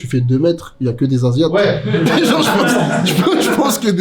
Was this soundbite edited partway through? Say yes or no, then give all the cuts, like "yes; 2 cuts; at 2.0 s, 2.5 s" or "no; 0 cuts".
no; 0 cuts